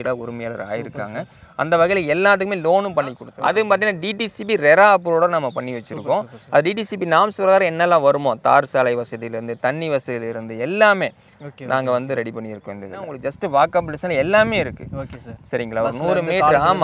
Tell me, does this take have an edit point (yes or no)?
yes